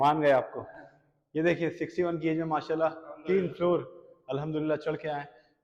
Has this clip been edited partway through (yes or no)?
no